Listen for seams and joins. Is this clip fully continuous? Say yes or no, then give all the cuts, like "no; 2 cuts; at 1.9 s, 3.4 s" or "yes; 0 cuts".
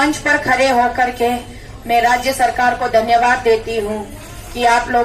yes; 0 cuts